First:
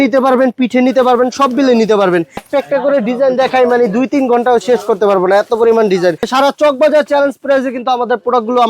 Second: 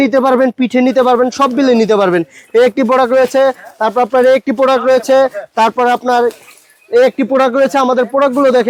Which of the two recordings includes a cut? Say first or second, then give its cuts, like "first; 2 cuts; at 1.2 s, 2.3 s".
first; 2 cuts; at 2.4 s, 6.3 s